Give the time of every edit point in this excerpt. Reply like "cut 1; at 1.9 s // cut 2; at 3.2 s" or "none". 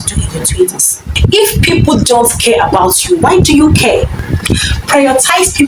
cut 1; at 1.1 s // cut 2; at 4.2 s